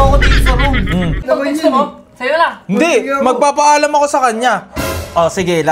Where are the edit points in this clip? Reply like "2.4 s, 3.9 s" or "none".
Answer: 1.2 s